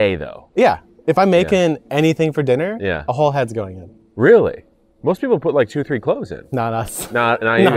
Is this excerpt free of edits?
no; 1 cut; at 6.4 s

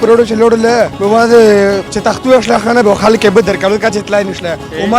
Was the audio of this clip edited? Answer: yes; 2 cuts; at 1.0 s, 1.9 s

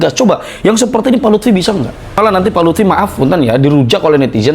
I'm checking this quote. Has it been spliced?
yes; 1 cut; at 2.2 s

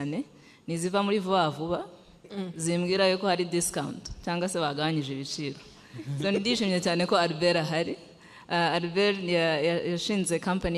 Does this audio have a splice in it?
no; 0 cuts

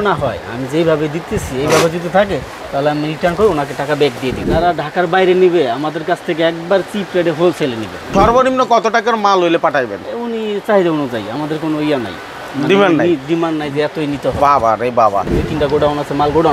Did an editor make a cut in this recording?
yes; 3 cuts; at 4.4 s, 8.1 s, 15.4 s

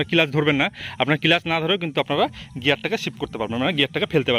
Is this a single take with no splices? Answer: yes; 0 cuts

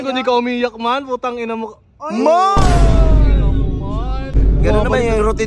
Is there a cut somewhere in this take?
yes; 1 cut; at 4.4 s

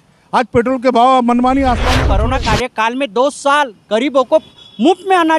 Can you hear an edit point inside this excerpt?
yes; 1 cut; at 2.0 s

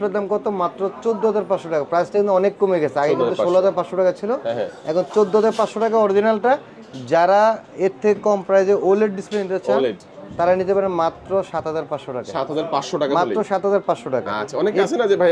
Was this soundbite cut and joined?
no; 0 cuts

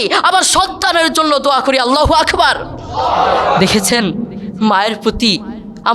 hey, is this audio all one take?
yes; 0 cuts

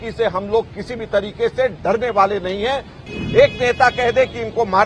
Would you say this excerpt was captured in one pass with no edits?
no; 1 cut; at 3.0 s

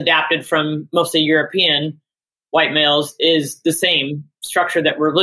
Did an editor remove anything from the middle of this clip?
no; 0 cuts

